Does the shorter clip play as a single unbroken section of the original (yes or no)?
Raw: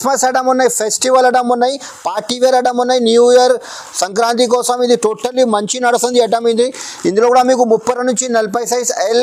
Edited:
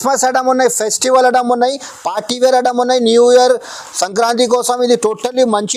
yes